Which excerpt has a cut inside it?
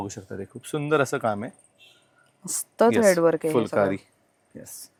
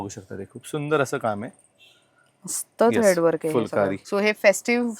second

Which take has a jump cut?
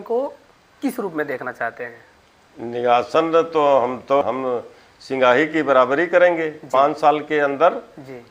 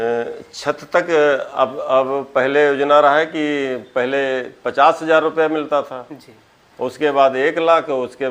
first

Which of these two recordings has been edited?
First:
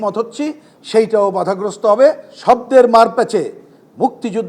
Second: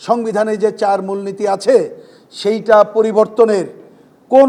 first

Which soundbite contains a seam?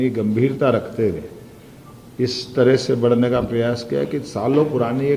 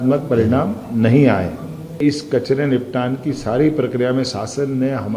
second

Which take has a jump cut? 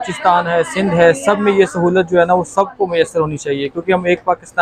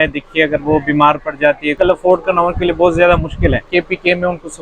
second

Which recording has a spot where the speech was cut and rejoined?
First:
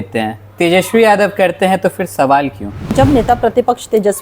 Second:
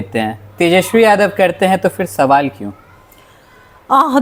first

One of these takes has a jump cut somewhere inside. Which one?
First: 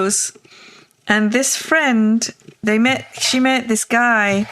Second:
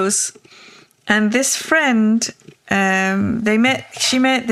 first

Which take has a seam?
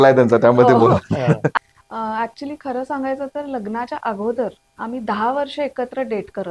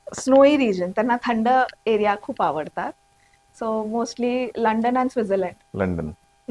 first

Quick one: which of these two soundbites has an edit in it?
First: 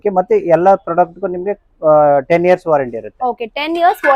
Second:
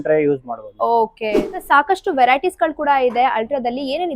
second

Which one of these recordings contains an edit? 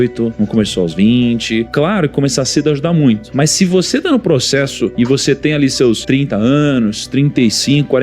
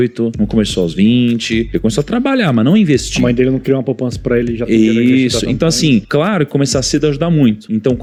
first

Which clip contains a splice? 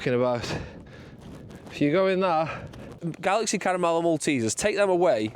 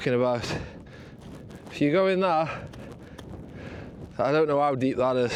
first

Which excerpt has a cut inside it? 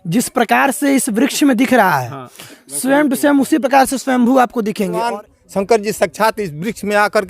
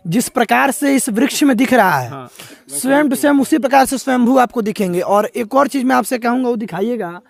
first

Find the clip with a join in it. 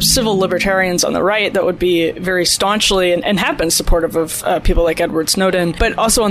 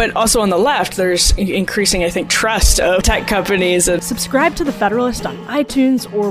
second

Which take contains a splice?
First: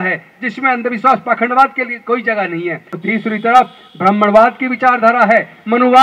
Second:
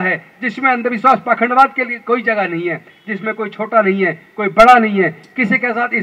first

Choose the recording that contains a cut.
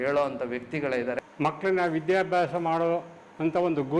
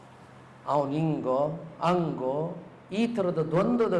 first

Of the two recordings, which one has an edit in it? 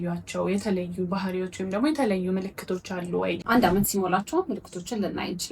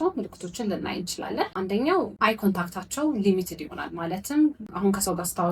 first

